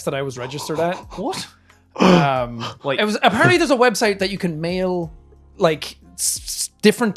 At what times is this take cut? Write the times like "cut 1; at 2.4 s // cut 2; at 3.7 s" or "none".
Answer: none